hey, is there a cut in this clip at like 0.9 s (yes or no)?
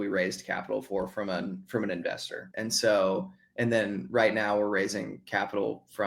no